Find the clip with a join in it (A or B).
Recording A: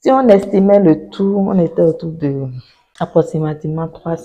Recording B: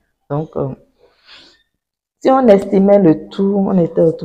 A